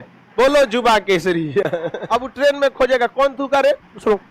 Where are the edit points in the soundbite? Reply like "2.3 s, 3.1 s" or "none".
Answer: 1.9 s